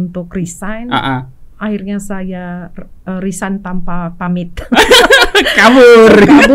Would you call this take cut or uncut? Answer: uncut